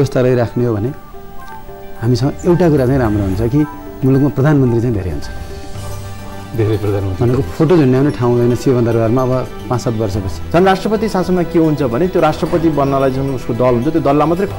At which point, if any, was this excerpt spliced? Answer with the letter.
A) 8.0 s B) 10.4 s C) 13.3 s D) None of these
B